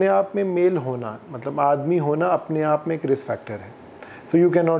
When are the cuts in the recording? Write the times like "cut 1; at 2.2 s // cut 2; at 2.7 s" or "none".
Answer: none